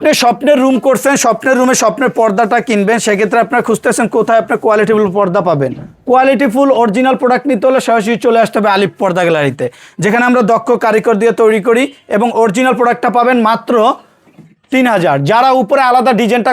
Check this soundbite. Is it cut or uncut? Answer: uncut